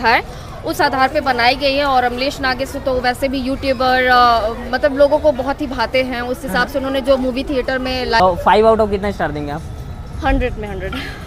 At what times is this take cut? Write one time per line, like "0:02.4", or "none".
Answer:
0:08.2